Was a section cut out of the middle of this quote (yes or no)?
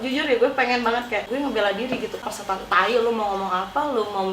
yes